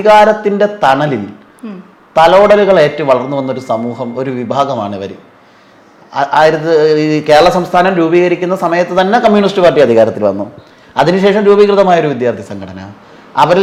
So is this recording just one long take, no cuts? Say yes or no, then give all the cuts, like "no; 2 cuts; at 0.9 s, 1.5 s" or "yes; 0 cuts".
yes; 0 cuts